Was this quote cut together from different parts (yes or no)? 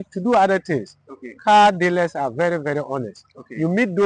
no